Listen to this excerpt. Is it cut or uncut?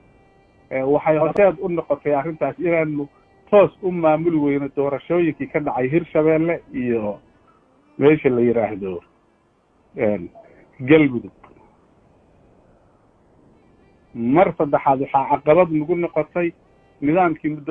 cut